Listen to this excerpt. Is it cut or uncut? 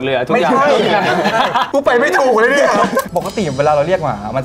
cut